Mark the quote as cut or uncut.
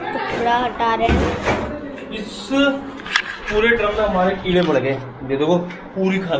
uncut